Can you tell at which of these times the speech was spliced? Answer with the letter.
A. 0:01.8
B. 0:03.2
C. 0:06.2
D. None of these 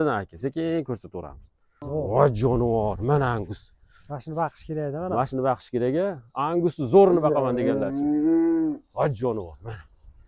A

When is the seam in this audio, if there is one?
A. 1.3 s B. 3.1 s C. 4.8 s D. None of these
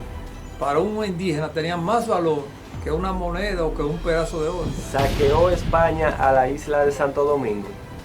C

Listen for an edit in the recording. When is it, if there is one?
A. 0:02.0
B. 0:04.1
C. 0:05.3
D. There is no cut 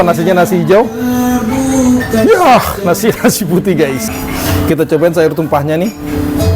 B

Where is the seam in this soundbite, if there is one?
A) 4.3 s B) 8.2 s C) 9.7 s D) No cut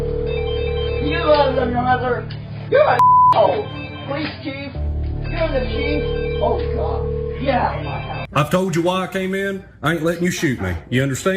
B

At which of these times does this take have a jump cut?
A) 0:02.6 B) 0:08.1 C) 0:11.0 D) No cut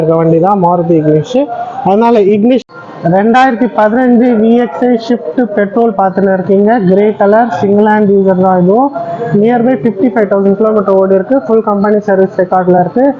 A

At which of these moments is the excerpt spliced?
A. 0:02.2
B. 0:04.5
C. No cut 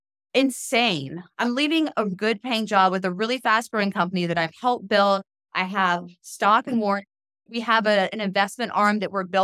A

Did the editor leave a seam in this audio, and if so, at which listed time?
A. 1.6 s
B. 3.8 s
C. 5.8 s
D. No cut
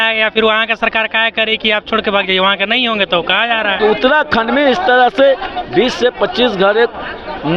B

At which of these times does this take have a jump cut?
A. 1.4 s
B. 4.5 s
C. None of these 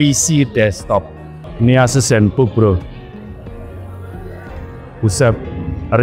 A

